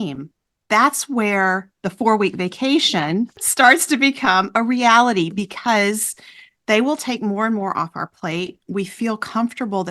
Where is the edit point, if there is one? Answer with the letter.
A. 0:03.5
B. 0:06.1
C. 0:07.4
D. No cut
A